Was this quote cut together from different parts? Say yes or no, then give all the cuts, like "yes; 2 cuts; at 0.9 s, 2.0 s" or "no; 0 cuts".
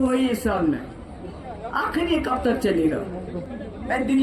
no; 0 cuts